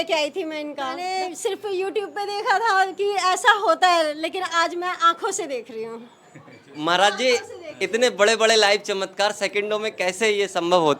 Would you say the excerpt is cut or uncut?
cut